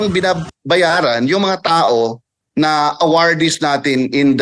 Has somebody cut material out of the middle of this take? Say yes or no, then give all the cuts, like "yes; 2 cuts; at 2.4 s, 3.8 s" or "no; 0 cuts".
no; 0 cuts